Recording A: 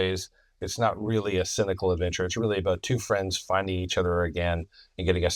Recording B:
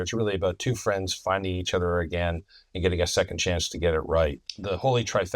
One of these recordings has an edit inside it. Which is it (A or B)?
B